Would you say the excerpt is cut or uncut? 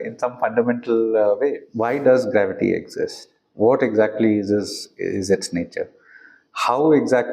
cut